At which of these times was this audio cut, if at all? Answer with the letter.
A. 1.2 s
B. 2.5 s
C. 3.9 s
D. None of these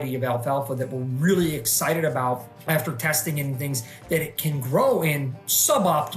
B